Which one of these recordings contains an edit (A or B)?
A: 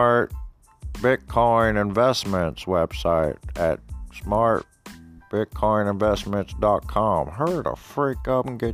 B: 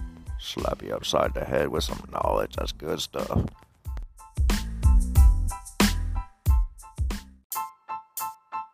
B